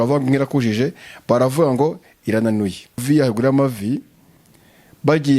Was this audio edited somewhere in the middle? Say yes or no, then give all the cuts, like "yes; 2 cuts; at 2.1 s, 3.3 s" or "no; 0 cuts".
yes; 1 cut; at 3.0 s